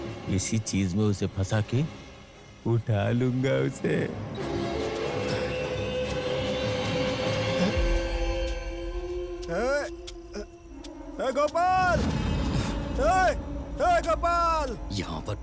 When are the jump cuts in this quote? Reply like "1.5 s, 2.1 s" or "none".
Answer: none